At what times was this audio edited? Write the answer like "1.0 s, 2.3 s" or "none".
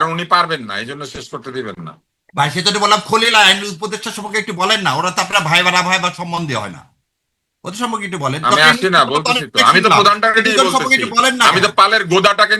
none